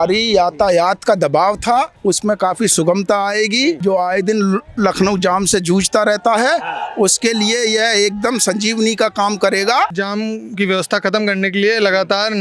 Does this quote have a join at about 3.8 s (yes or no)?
yes